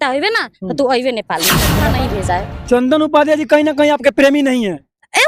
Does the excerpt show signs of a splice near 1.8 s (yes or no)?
yes